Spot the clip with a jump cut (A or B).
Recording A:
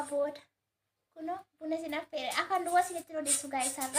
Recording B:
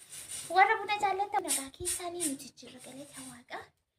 B